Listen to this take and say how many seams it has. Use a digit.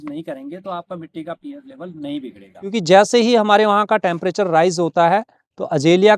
1